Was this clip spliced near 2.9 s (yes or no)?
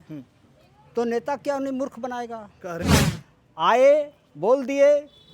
yes